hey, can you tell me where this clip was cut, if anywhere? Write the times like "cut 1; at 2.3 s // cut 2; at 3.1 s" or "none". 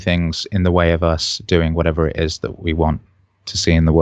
none